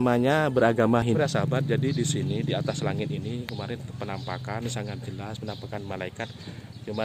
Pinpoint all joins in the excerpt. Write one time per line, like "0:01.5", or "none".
0:01.1

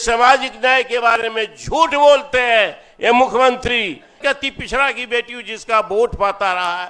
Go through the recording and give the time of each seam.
0:04.2

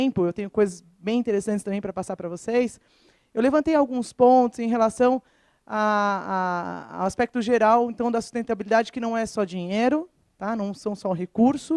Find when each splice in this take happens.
0:03.2

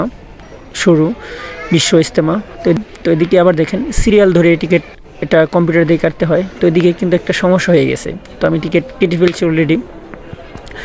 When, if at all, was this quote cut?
0:02.8

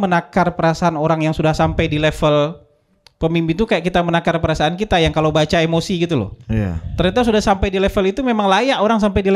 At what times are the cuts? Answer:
none

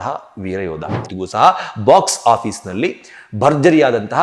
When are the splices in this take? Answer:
0:01.1

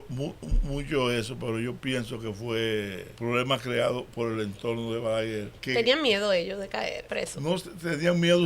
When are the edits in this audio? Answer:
0:03.1
0:05.5
0:07.0

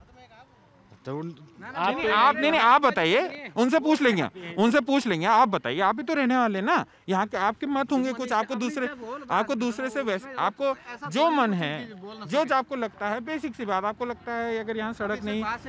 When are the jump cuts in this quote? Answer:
none

